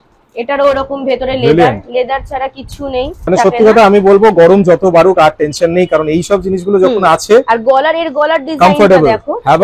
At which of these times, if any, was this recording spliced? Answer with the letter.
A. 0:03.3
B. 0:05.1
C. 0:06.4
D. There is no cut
A